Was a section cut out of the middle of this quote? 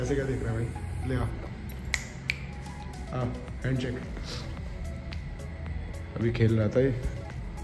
no; 0 cuts

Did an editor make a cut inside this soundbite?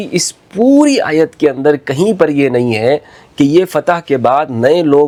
no; 0 cuts

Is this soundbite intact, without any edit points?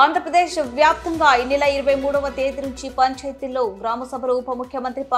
yes; 0 cuts

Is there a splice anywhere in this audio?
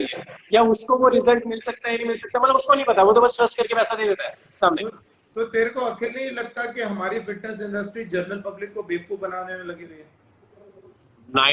no; 0 cuts

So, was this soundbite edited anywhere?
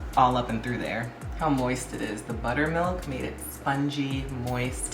yes; 1 cut; at 1.2 s

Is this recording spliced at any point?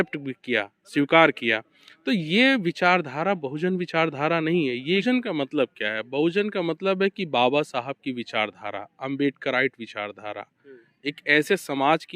yes; 1 cut; at 5.0 s

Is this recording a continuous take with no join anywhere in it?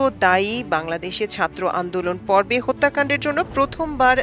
yes; 0 cuts

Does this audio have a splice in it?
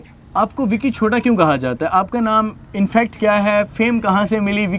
no; 0 cuts

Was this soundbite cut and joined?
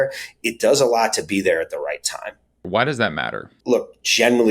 yes; 2 cuts; at 2.7 s, 3.5 s

